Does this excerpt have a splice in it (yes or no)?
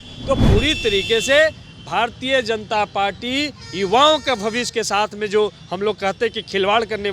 no